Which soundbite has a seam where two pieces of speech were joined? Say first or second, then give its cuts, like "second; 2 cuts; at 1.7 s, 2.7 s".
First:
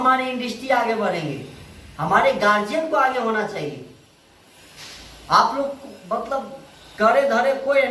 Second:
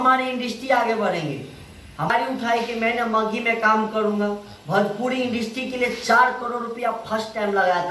second; 1 cut; at 2.0 s